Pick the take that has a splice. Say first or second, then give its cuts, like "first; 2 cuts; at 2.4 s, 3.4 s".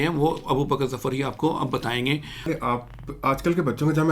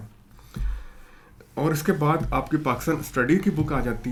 first; 1 cut; at 2.5 s